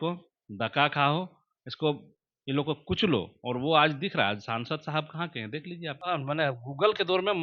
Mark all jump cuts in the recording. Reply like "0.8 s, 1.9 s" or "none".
6.1 s